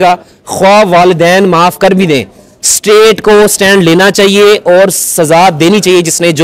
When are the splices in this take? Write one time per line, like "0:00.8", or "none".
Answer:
none